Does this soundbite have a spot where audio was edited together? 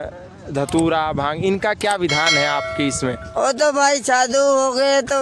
no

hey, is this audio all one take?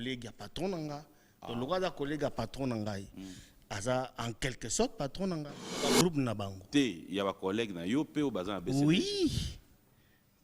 no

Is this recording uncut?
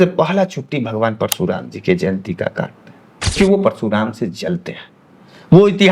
no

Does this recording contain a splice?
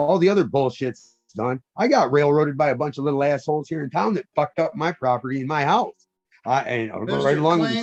no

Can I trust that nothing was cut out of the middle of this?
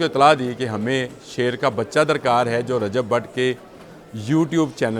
yes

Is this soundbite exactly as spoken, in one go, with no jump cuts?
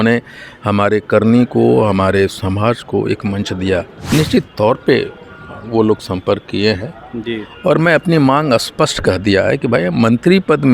no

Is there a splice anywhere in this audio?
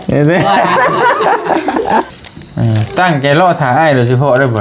yes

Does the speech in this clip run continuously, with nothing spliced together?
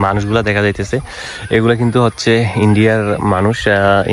yes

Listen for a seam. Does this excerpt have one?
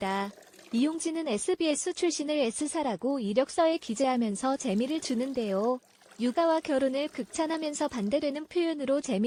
no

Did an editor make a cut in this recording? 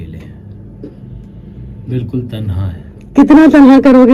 no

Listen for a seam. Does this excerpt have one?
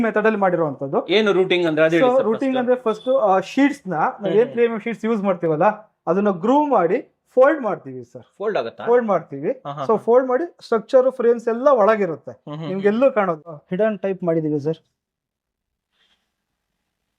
yes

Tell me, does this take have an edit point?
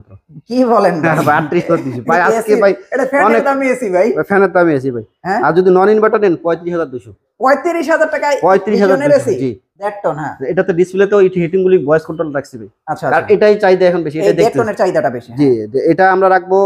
yes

